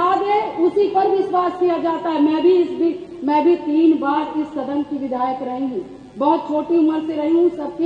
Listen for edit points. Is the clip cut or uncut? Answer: uncut